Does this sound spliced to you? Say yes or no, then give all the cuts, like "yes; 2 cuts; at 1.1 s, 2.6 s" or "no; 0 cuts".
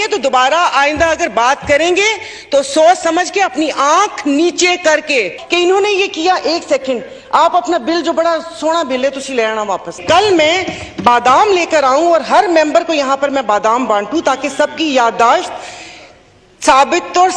yes; 2 cuts; at 5.4 s, 10.0 s